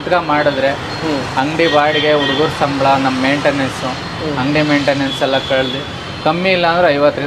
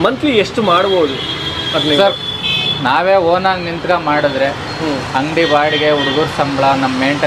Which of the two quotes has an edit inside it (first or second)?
second